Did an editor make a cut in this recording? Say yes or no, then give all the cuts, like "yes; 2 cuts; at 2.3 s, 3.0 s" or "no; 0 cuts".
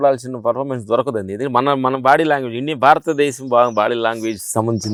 no; 0 cuts